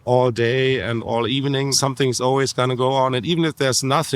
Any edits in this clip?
yes; 1 cut; at 1.7 s

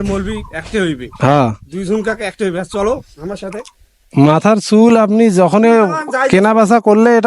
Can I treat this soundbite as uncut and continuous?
no; 1 cut; at 1.1 s

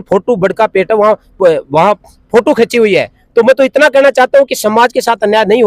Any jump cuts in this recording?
no; 0 cuts

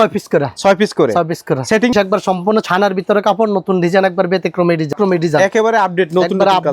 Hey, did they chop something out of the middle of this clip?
yes; 2 cuts; at 1.9 s, 4.9 s

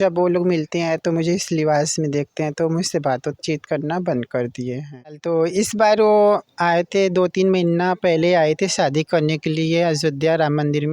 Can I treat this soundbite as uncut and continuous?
no; 1 cut; at 5.1 s

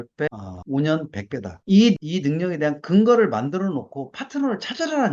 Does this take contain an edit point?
no; 0 cuts

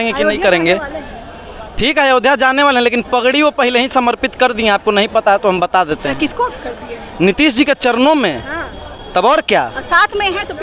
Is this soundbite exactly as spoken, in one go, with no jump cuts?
yes; 0 cuts

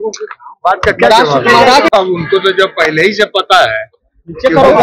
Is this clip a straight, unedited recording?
no; 1 cut; at 1.9 s

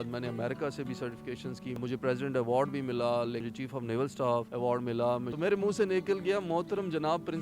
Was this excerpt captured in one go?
no; 3 cuts; at 1.7 s, 3.5 s, 5.3 s

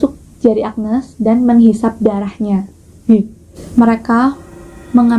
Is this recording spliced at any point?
yes; 1 cut; at 3.6 s

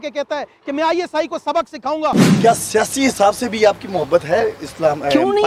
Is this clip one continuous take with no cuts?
no; 1 cut; at 2.2 s

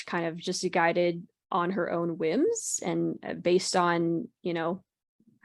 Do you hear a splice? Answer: no; 0 cuts

